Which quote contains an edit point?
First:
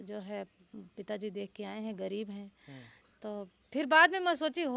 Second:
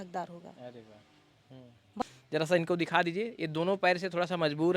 second; 1 cut; at 2.0 s

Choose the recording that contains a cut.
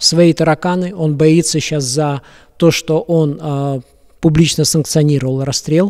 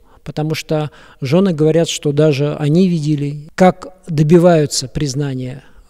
second; 1 cut; at 3.4 s

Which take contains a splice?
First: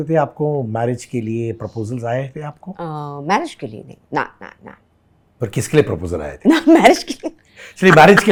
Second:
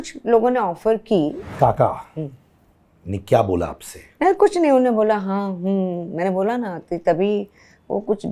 second; 1 cut; at 1.4 s

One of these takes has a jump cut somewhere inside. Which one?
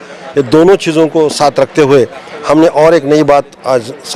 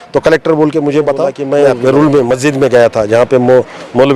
second; 1 cut; at 1.4 s

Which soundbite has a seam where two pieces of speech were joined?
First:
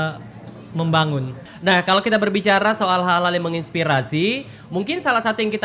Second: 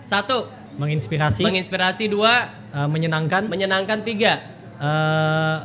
first; 1 cut; at 1.4 s

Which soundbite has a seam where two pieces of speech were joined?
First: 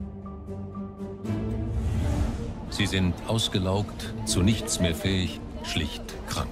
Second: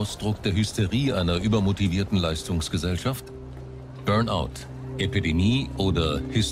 second; 1 cut; at 4.3 s

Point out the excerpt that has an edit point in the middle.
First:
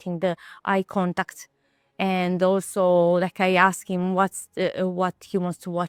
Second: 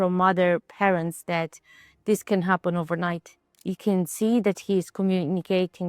second; 1 cut; at 3.7 s

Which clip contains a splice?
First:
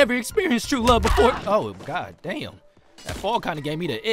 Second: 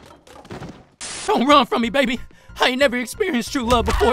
second; 1 cut; at 1.2 s

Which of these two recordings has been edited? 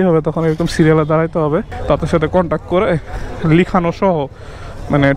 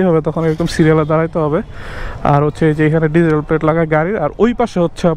first; 1 cut; at 1.7 s

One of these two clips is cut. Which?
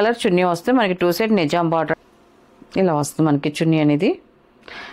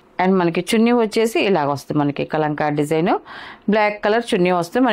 first; 1 cut; at 1.9 s

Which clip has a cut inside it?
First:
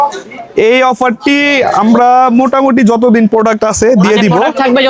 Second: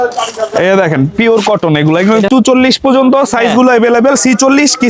second; 1 cut; at 2.3 s

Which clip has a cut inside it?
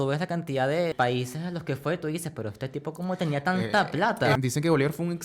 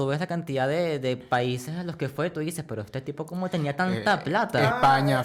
first; 2 cuts; at 0.9 s, 4.4 s

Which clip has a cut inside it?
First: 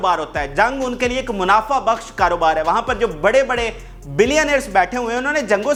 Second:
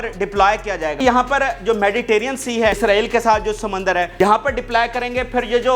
second; 3 cuts; at 1.0 s, 2.8 s, 4.1 s

